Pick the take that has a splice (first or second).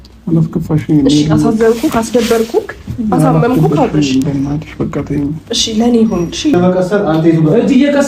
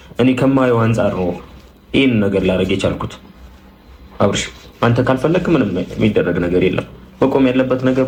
first